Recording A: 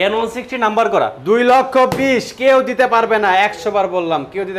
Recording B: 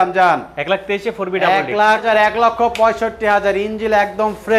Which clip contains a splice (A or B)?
B